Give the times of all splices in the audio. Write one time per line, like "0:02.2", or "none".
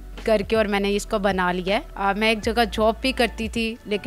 0:01.9